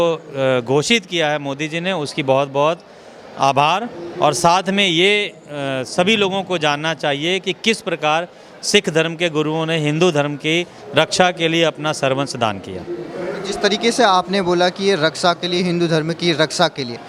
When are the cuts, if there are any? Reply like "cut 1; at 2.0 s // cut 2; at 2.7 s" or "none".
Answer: none

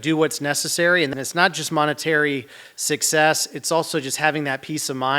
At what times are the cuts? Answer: cut 1; at 1.1 s

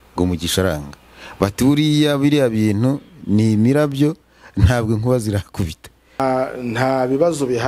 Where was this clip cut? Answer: cut 1; at 6.2 s

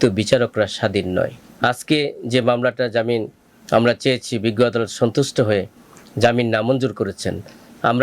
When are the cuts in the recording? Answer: cut 1; at 1.4 s

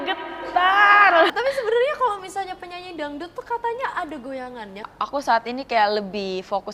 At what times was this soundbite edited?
cut 1; at 1.3 s // cut 2; at 4.9 s

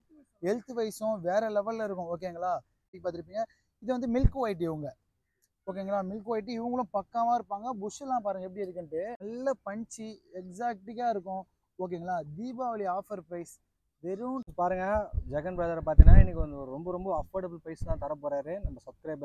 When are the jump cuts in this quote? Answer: cut 1; at 3.0 s // cut 2; at 9.2 s // cut 3; at 14.5 s

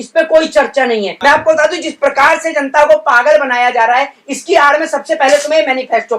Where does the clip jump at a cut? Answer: cut 1; at 1.1 s

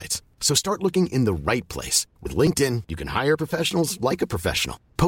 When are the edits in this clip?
none

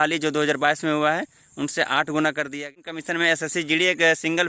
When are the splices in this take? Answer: cut 1; at 2.6 s

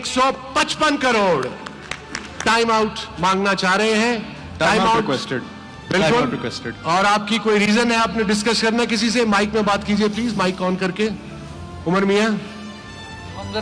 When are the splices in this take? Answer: none

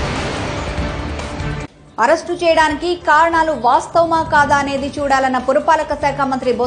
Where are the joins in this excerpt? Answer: cut 1; at 1.6 s

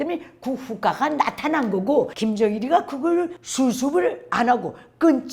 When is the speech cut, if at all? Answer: cut 1; at 2.1 s

